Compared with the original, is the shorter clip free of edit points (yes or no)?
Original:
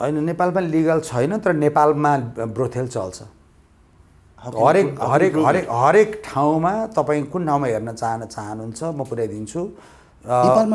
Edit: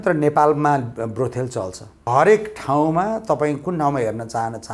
no